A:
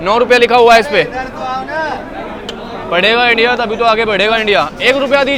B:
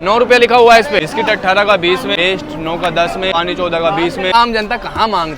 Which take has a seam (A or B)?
B